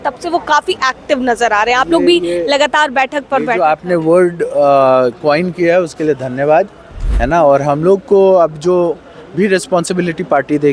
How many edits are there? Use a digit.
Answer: 0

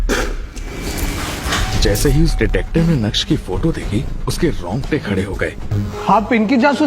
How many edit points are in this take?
1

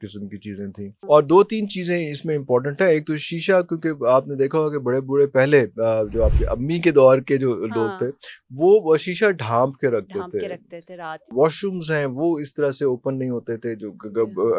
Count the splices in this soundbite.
2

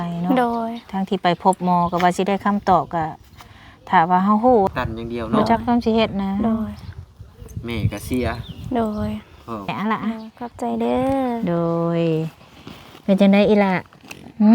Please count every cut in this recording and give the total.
2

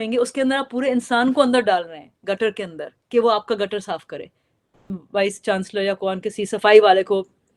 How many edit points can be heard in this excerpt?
1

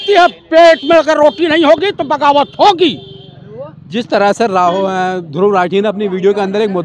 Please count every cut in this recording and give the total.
0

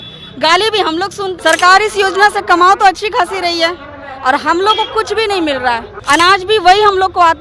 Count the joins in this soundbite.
2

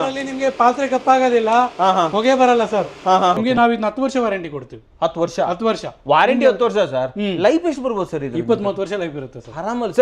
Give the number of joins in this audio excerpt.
1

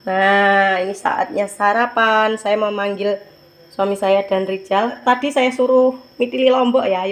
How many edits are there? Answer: 1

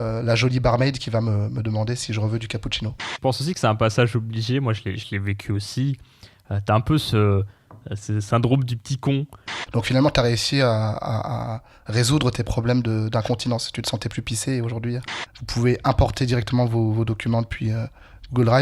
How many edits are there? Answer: 3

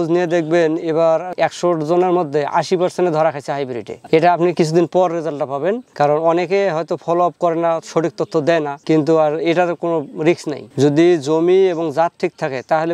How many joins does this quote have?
0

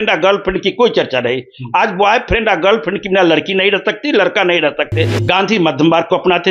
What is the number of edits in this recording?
1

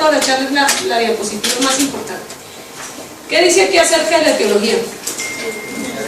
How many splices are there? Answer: 1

